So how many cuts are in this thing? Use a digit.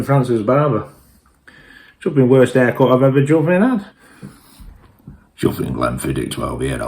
1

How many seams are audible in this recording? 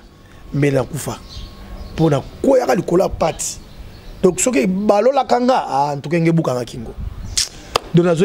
0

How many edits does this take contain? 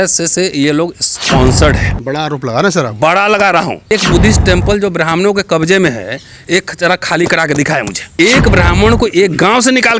2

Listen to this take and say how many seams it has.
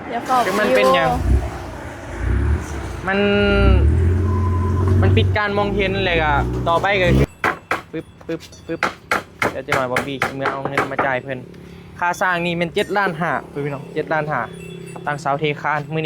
1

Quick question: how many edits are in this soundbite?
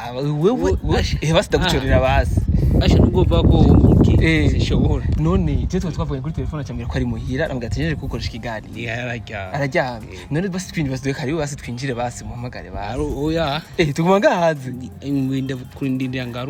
0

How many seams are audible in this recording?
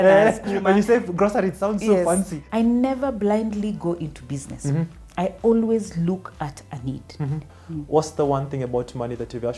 2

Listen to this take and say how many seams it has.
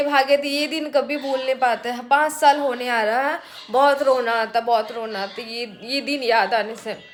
0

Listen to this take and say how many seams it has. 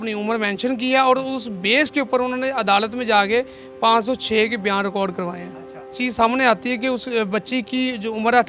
1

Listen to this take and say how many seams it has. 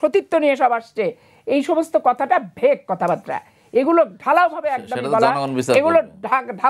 0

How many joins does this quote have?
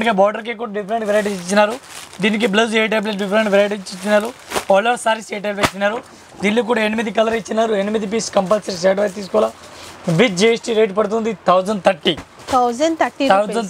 0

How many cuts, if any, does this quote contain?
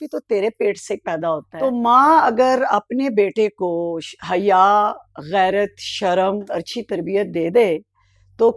2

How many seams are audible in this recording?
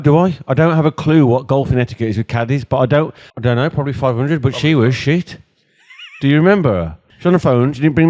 2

